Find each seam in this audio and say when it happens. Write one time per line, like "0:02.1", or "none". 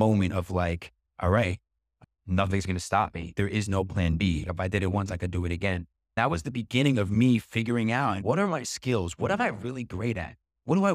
0:06.2
0:08.2